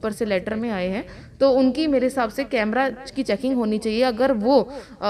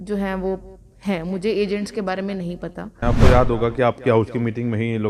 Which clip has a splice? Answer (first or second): second